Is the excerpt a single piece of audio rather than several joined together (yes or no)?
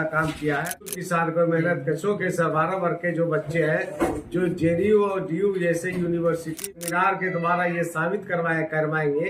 no